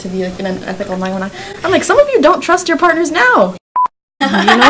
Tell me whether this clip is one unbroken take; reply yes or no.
no